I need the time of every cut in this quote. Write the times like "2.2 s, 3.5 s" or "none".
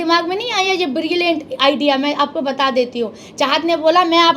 none